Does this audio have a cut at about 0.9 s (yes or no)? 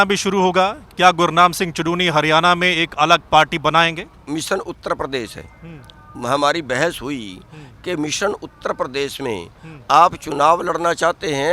no